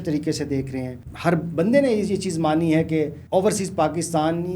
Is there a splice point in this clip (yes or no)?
yes